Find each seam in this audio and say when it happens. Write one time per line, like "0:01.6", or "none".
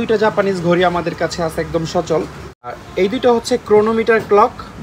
0:02.8